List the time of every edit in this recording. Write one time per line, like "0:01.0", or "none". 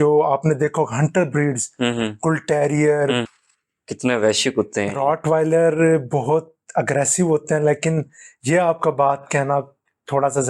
0:03.2